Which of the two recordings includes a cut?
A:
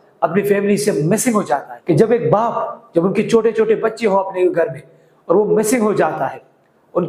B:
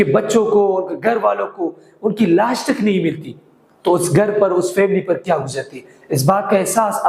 A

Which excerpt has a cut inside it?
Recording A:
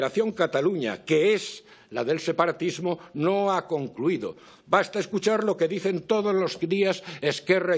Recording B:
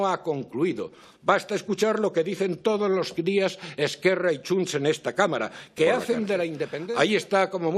B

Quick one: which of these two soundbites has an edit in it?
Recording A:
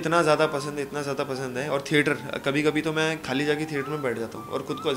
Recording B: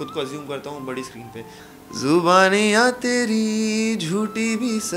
B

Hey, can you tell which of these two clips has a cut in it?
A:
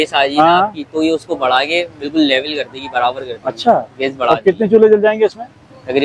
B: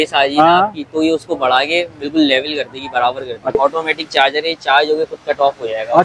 B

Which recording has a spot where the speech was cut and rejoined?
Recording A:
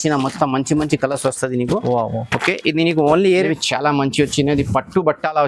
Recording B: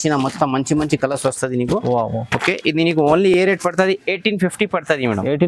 A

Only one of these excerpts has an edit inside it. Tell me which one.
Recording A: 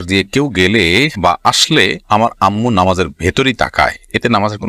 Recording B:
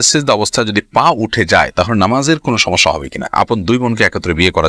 B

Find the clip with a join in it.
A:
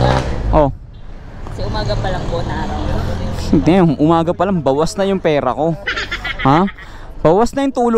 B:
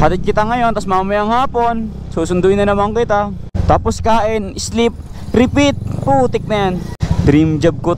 B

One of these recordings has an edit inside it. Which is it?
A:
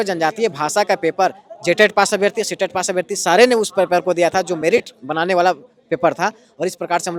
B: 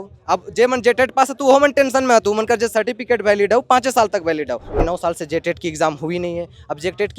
B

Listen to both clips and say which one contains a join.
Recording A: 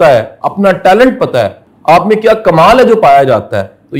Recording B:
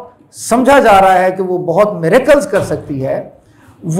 A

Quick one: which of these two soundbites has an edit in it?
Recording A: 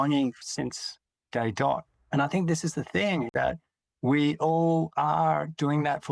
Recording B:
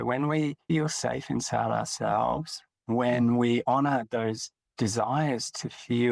A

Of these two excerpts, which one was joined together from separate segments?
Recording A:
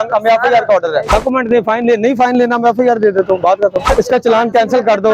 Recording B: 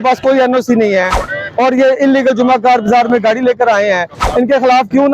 A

